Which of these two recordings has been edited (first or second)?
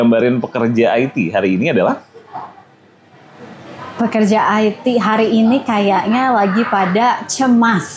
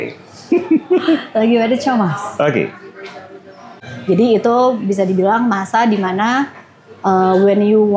second